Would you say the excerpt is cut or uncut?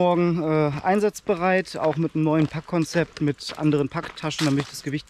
uncut